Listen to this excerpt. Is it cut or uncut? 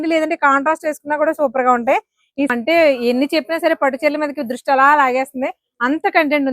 cut